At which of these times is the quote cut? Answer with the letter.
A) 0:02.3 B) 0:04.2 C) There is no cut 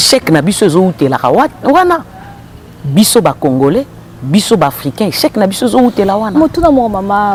C